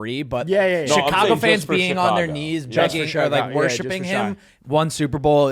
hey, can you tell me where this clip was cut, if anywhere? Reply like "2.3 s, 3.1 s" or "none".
none